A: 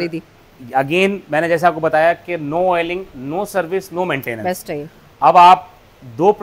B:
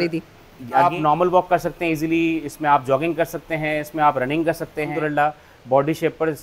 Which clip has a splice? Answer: B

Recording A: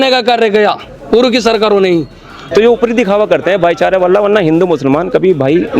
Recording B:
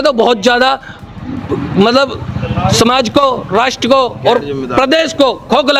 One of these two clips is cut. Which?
A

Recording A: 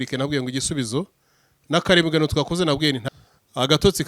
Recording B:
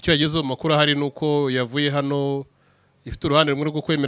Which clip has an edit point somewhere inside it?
A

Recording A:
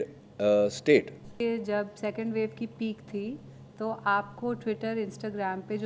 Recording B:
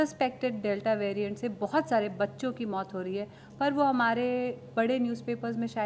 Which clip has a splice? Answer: A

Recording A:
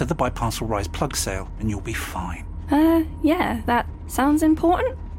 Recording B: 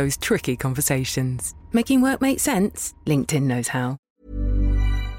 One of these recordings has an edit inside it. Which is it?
B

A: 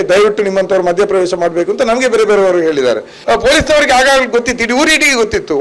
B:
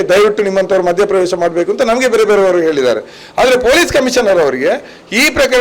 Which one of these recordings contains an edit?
A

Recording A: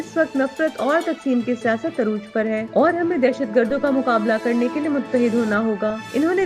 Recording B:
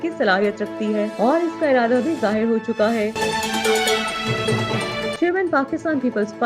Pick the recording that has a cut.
B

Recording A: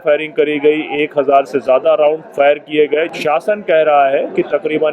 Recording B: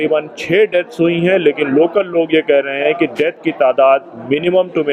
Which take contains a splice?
A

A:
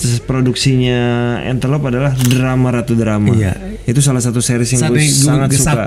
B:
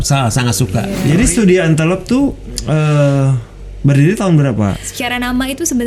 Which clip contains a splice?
B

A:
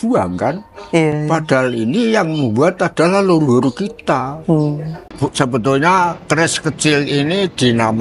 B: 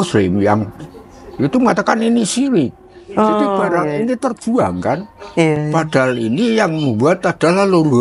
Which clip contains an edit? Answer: A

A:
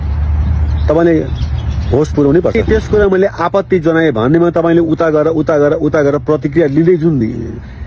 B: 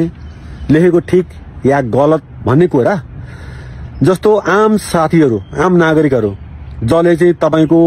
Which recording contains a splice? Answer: A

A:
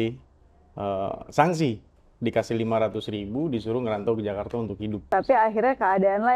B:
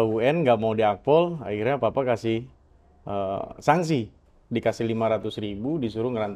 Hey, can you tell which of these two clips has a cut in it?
A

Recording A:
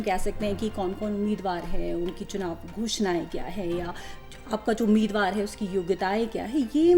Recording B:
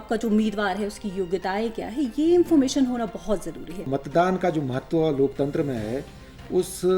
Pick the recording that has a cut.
B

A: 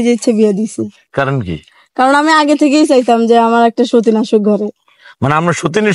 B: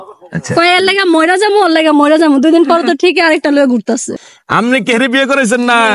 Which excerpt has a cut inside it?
B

